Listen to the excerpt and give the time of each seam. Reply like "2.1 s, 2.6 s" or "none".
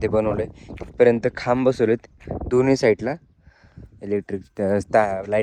none